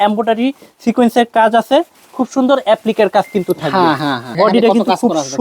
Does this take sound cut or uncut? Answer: cut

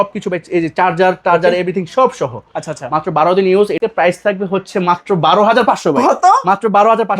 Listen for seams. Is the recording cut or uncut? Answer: cut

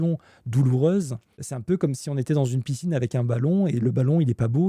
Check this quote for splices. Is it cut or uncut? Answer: cut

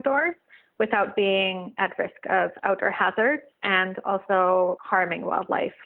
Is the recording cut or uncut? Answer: cut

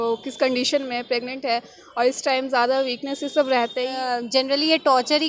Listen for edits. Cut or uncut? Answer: cut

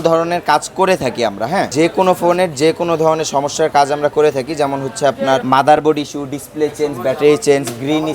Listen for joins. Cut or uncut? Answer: cut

